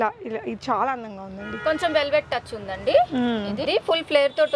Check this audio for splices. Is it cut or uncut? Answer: cut